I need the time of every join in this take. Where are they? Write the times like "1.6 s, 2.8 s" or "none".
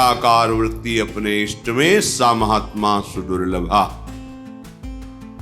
4.0 s